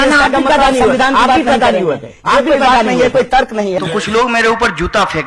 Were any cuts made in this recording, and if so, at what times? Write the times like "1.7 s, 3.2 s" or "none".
3.8 s